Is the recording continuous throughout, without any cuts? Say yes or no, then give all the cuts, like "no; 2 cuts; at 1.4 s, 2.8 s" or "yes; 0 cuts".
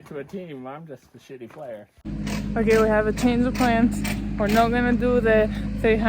no; 1 cut; at 2.2 s